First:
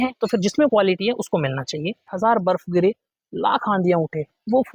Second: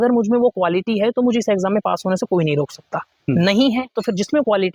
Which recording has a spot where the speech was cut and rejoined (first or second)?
first